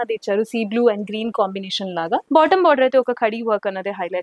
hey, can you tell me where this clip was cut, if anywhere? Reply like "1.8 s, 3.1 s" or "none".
2.2 s